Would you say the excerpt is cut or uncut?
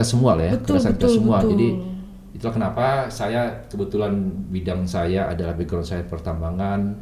uncut